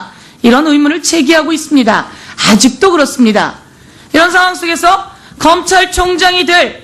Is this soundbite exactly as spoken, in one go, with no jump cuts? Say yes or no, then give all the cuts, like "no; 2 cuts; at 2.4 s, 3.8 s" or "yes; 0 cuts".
no; 1 cut; at 5.9 s